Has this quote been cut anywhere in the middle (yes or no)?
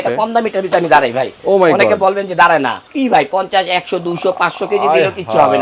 no